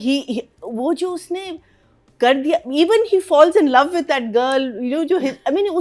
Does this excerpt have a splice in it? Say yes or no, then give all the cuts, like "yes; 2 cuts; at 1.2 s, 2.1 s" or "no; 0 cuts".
no; 0 cuts